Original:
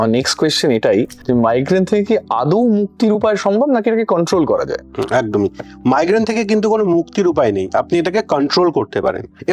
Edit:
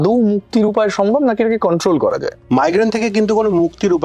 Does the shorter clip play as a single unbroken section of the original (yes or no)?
no